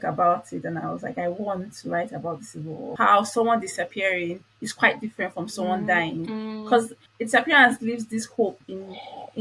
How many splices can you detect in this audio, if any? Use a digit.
2